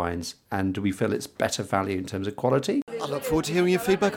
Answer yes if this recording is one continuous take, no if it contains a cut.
no